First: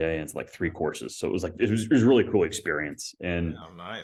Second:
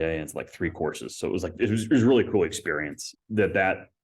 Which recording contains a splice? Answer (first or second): second